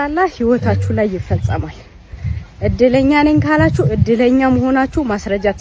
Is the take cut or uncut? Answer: uncut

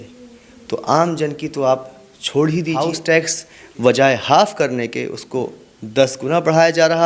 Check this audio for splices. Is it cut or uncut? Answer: cut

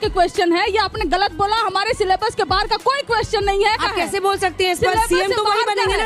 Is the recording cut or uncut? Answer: cut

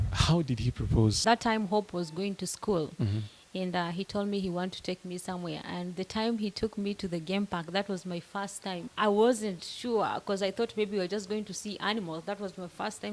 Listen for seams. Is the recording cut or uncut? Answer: cut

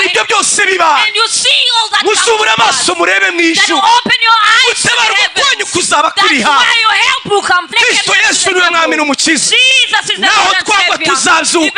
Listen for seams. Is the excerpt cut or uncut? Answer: cut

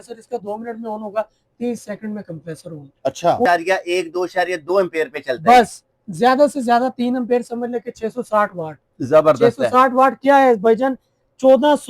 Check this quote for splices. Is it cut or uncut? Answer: cut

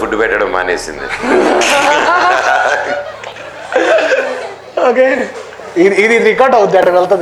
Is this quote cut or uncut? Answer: uncut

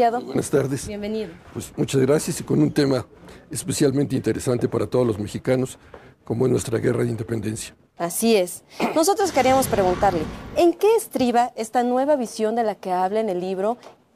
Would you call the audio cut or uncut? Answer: cut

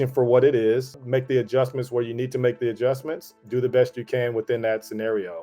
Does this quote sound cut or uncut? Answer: cut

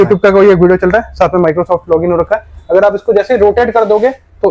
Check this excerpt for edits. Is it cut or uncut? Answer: uncut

